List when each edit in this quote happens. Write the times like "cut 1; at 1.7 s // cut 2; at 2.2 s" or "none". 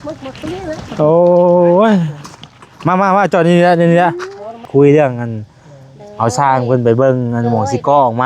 cut 1; at 4.7 s